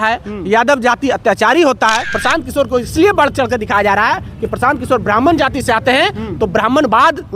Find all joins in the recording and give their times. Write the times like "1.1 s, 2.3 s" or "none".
2.2 s